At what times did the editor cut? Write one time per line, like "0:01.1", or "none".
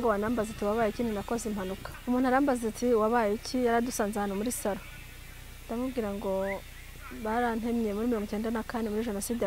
0:01.8